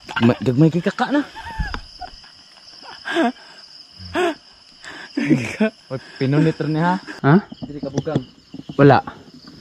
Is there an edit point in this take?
yes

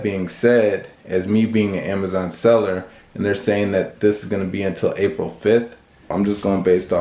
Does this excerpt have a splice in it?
yes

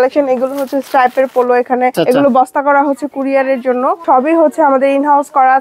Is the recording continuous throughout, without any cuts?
no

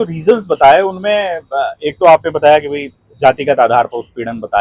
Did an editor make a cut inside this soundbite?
no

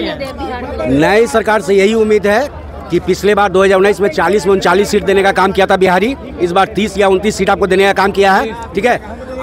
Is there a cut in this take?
no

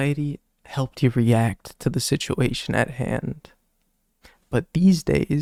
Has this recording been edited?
no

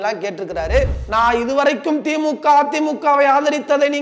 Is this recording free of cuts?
no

